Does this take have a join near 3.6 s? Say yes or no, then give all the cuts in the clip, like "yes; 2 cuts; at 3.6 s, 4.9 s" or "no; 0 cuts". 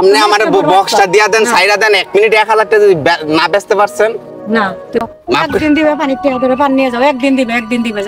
no; 1 cut; at 5.0 s